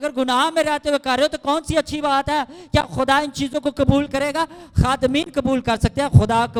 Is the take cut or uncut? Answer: uncut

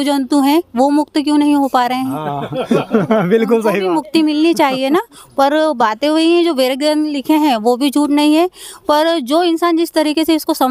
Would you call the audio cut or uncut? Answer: uncut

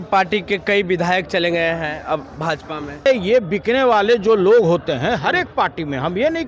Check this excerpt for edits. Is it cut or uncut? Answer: cut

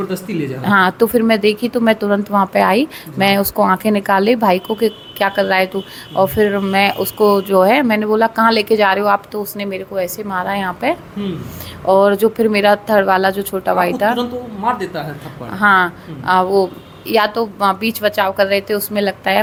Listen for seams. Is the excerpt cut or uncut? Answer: uncut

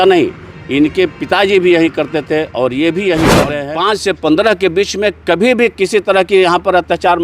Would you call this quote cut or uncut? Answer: cut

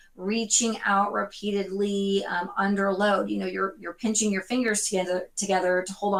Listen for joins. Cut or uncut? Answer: uncut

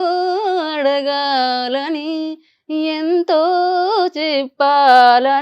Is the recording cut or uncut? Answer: uncut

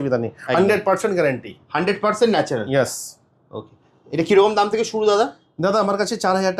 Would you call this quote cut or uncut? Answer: uncut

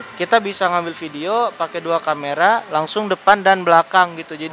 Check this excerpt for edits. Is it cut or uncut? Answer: uncut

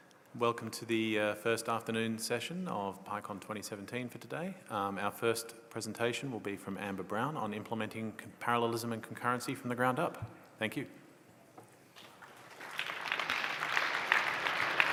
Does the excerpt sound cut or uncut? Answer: uncut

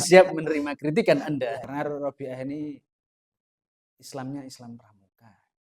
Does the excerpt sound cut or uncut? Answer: cut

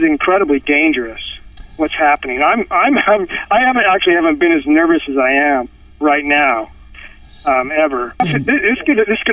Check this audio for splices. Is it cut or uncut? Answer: cut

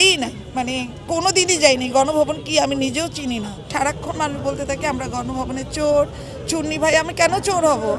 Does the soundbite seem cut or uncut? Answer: cut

